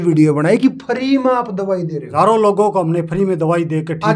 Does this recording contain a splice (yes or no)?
yes